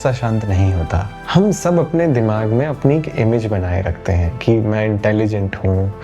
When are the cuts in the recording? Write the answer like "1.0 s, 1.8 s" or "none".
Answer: 1.1 s